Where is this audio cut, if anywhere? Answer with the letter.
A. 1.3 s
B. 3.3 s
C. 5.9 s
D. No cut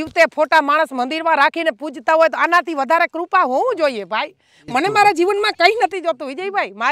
D